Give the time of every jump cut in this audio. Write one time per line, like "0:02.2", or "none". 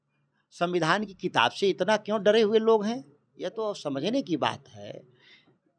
none